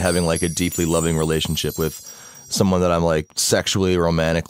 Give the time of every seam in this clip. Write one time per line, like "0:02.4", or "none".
0:01.7
0:03.3